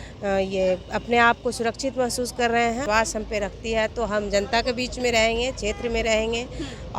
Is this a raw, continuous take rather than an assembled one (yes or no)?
no